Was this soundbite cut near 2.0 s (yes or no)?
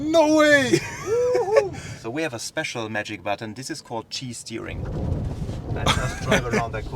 yes